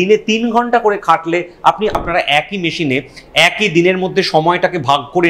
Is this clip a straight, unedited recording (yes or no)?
no